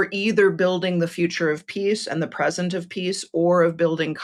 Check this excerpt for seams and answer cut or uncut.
uncut